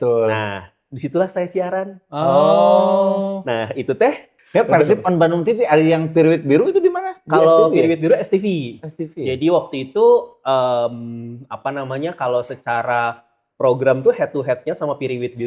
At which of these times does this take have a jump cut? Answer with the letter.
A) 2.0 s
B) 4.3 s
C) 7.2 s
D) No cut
B